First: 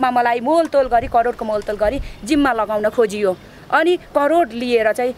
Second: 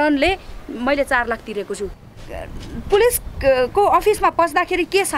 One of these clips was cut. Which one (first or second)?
second